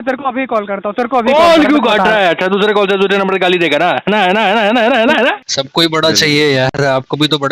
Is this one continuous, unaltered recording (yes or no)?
no